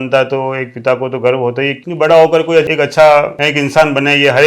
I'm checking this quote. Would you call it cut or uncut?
cut